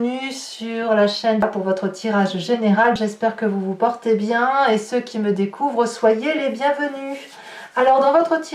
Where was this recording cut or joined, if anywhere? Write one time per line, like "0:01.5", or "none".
0:01.4
0:03.0

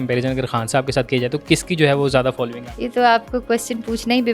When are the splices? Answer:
0:01.4
0:02.7

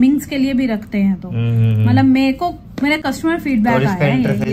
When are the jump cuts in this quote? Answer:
none

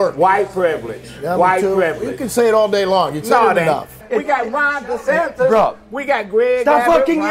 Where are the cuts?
0:03.9

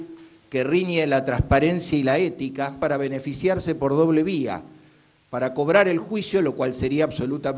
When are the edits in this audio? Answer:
0:02.8

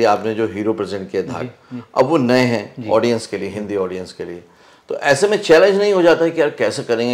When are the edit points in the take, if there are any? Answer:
none

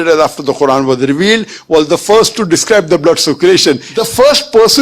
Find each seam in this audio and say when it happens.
0:03.9

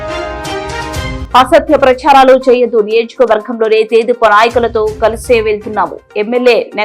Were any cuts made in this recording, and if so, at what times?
0:01.2

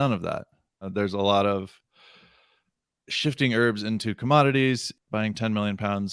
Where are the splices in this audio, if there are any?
0:00.9
0:04.9

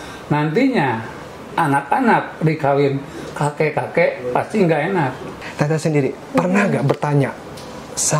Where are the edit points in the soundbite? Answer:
0:05.4

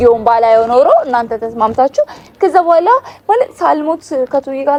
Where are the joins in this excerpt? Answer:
none

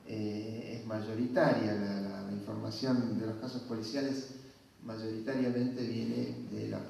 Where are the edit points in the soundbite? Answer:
0:05.1

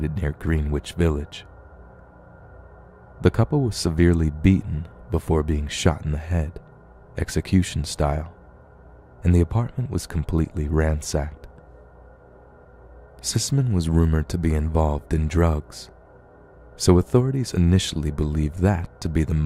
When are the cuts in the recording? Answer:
none

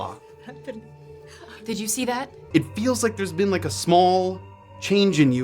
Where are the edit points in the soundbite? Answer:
0:02.4

